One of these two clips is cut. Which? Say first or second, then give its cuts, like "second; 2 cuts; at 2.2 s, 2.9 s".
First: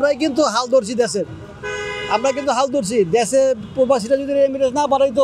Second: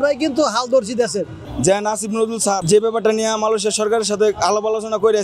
second; 2 cuts; at 1.4 s, 2.6 s